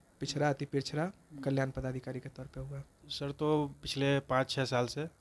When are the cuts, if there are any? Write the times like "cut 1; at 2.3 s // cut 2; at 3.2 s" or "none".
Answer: cut 1; at 2.9 s